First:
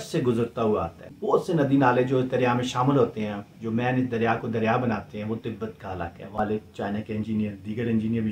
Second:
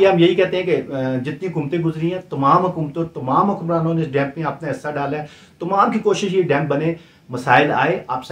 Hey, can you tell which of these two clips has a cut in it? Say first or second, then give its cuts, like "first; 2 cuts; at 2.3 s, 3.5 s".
first; 2 cuts; at 1.1 s, 6.4 s